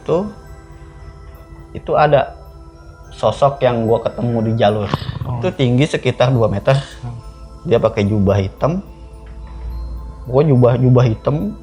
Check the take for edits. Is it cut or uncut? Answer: cut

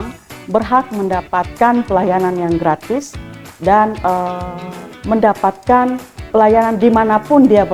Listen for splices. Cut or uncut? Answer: uncut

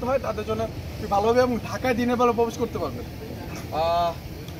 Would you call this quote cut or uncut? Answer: uncut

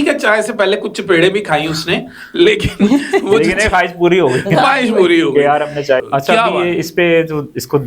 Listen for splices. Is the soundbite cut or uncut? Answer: cut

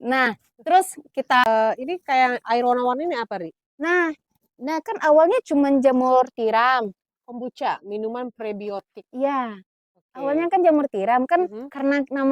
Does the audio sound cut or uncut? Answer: cut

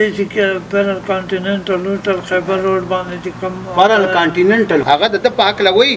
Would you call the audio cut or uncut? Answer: cut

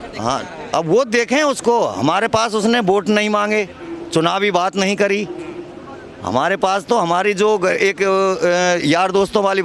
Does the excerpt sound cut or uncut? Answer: uncut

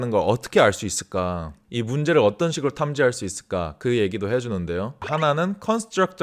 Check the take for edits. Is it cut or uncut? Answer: cut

